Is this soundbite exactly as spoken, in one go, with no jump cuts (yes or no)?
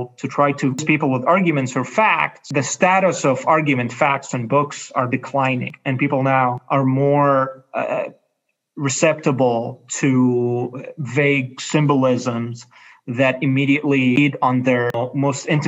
no